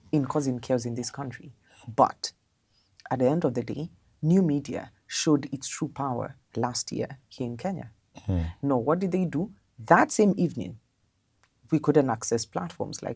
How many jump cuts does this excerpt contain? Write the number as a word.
zero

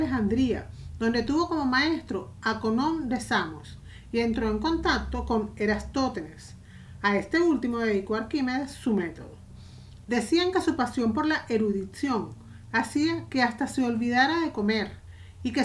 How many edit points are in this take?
one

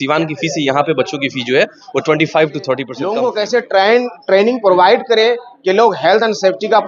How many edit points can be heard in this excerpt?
one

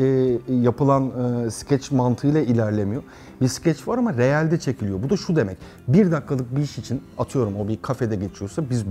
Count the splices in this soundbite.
zero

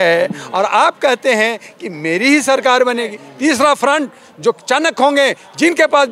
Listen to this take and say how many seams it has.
one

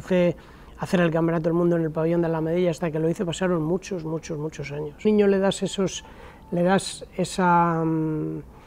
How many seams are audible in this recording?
one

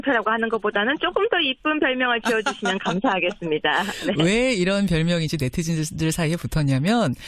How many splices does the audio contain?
zero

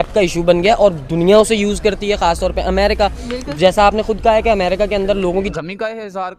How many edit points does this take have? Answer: one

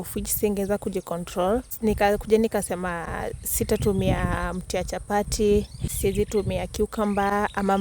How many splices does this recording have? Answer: two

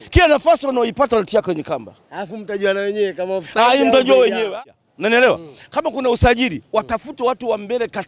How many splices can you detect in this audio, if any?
one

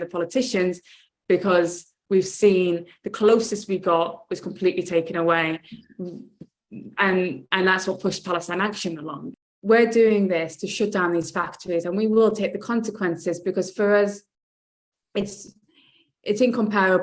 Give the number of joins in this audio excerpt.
one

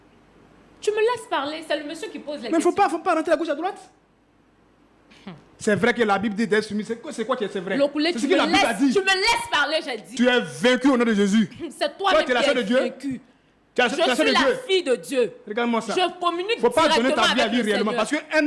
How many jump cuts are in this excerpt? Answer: one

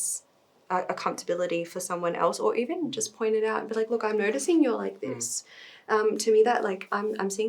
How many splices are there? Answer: zero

